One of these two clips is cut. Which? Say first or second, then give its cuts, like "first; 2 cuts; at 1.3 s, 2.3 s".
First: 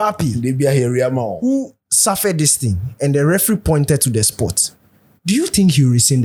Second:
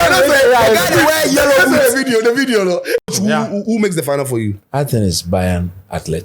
second; 1 cut; at 3.1 s